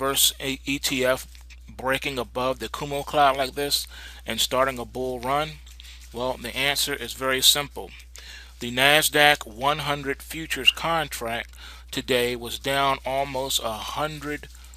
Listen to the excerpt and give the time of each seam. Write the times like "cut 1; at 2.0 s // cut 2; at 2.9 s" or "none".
cut 1; at 8.9 s